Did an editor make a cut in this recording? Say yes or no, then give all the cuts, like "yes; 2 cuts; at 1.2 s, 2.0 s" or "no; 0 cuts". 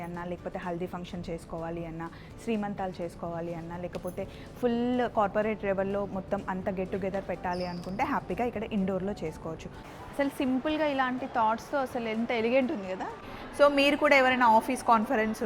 yes; 2 cuts; at 9.8 s, 13.4 s